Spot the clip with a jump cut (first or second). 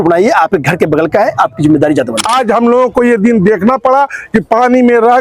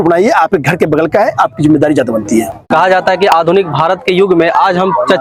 first